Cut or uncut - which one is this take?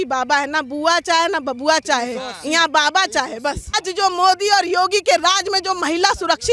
cut